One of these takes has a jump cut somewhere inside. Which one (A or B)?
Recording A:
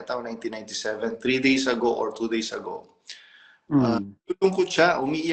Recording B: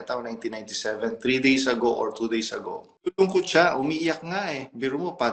B